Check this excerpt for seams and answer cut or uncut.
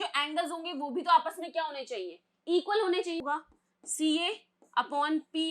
cut